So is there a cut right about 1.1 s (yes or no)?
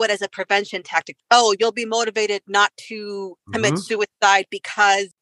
yes